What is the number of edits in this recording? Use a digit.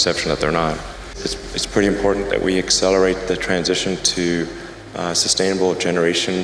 1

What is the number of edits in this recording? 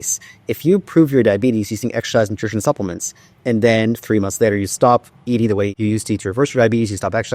1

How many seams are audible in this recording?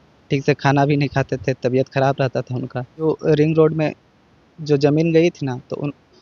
1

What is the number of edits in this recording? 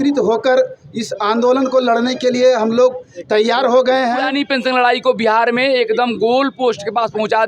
1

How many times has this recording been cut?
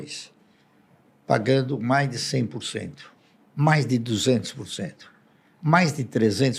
0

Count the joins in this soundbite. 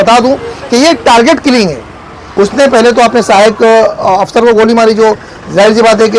1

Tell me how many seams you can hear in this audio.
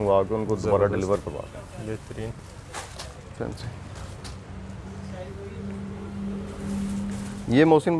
0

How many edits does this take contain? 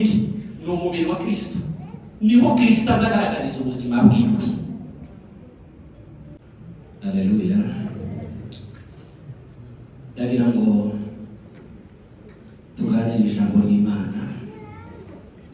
1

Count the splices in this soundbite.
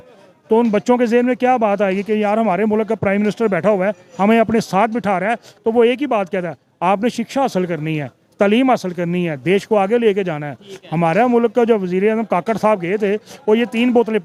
0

